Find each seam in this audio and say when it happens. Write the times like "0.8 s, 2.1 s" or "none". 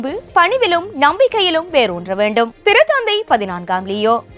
none